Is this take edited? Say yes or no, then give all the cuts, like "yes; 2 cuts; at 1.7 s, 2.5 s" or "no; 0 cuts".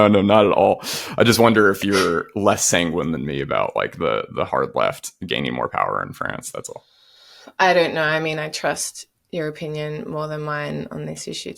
no; 0 cuts